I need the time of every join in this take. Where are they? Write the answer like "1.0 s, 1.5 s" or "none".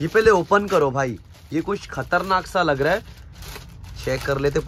none